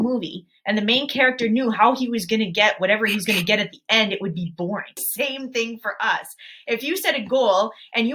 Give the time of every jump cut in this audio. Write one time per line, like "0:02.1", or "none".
0:05.1